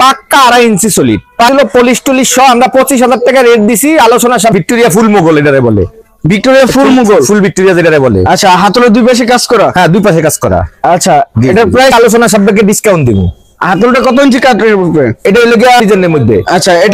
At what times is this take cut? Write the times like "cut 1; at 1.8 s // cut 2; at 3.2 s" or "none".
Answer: cut 1; at 1.5 s // cut 2; at 4.5 s // cut 3; at 11.9 s // cut 4; at 15.8 s